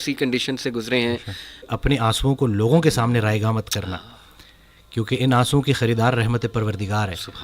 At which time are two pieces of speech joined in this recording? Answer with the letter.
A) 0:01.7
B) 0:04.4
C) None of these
A